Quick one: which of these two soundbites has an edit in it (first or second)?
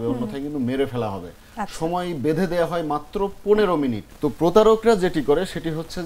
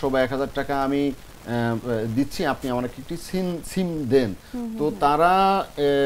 first